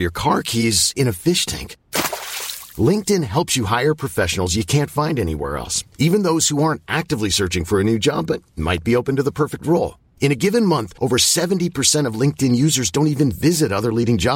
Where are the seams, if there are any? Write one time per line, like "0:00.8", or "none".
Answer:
none